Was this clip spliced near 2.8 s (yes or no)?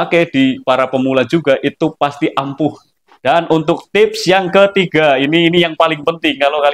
yes